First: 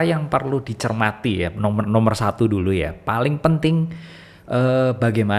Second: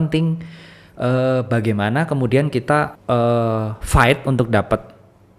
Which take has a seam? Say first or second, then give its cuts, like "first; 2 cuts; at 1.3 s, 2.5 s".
second; 1 cut; at 3.0 s